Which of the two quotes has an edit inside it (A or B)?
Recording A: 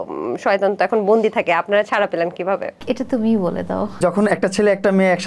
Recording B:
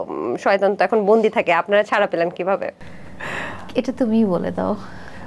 A